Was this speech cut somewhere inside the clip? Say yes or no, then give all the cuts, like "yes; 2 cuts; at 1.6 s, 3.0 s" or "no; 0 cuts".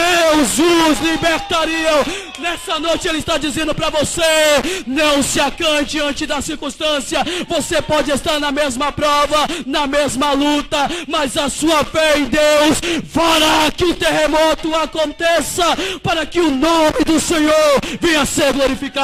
no; 0 cuts